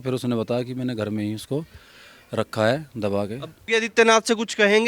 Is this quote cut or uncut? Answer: cut